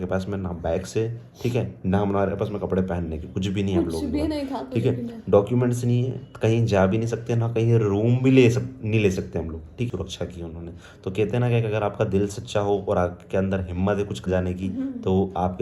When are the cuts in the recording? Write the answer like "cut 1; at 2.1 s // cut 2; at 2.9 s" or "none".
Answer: cut 1; at 9.9 s // cut 2; at 14.3 s

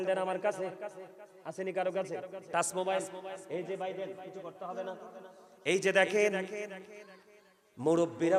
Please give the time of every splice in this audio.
none

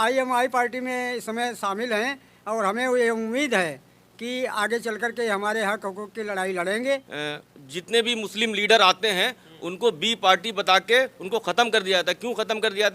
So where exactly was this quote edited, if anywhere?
cut 1; at 7.1 s

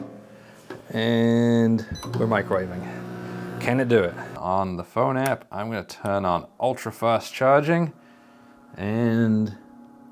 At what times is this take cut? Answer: cut 1; at 4.3 s

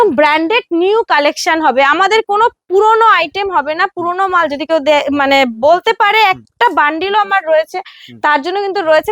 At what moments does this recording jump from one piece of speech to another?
none

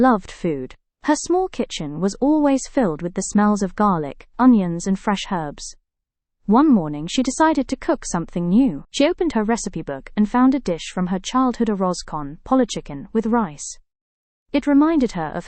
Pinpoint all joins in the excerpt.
none

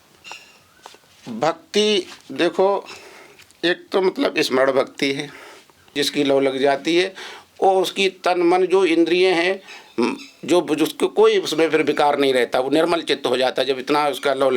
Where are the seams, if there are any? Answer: cut 1; at 6.0 s

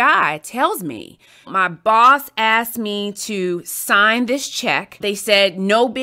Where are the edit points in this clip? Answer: cut 1; at 1.5 s // cut 2; at 5.0 s

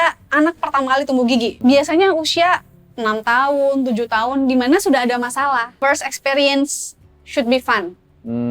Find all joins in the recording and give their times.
cut 1; at 1.6 s // cut 2; at 5.7 s

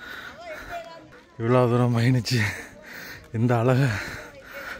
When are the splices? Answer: cut 1; at 1.2 s

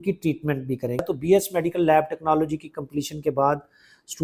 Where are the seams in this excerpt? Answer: cut 1; at 1.0 s

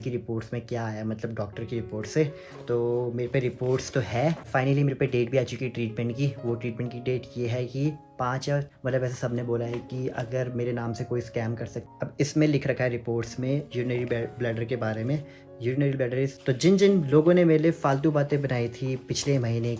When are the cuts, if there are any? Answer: cut 1; at 4.5 s // cut 2; at 8.7 s // cut 3; at 11.8 s // cut 4; at 16.4 s

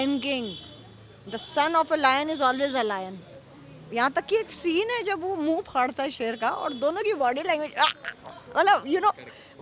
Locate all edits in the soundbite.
none

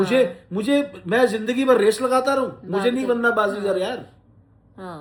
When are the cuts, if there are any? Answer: none

